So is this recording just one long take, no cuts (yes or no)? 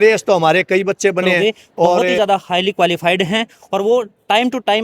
no